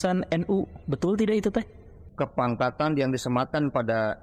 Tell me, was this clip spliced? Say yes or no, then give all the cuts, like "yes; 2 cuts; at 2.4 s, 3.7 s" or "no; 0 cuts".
yes; 1 cut; at 2.0 s